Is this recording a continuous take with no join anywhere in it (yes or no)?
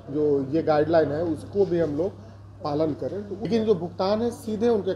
no